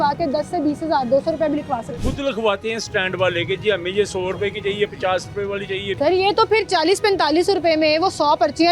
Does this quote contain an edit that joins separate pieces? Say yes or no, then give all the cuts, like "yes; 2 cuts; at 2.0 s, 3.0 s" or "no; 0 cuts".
yes; 2 cuts; at 2.2 s, 6.0 s